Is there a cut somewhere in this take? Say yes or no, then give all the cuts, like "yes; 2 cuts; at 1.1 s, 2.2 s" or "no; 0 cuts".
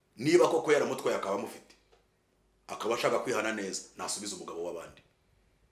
no; 0 cuts